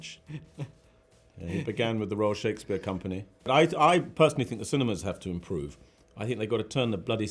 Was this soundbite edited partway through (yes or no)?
yes